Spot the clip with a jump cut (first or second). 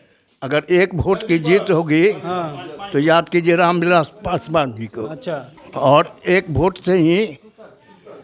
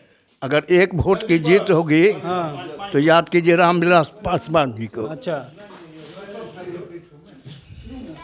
first